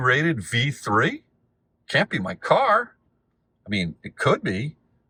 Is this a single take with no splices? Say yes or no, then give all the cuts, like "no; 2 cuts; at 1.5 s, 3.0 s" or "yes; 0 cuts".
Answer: yes; 0 cuts